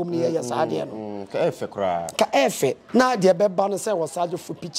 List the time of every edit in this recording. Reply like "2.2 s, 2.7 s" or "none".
2.8 s